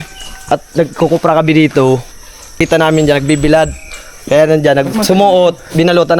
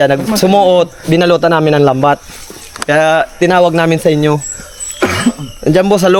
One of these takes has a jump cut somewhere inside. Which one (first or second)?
first